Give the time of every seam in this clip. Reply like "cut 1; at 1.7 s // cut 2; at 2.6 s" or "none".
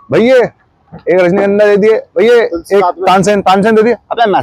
none